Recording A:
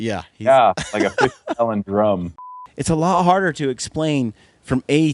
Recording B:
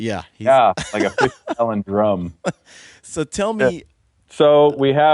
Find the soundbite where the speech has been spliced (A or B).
A